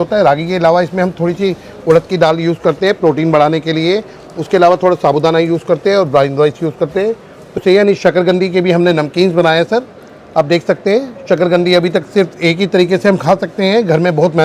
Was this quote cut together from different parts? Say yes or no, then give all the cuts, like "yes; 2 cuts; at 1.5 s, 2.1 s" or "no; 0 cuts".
yes; 1 cut; at 7.6 s